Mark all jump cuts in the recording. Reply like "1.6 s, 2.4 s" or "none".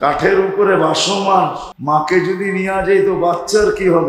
1.7 s